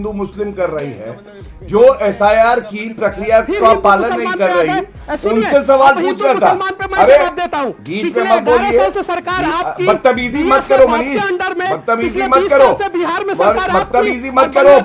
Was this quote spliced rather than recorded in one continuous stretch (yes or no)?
no